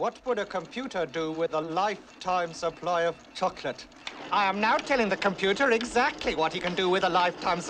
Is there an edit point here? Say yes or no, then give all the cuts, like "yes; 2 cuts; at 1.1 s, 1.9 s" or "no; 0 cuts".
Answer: no; 0 cuts